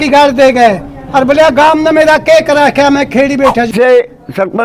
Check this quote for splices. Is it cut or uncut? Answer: cut